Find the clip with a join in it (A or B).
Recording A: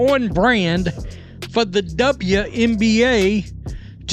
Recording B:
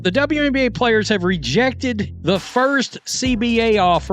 B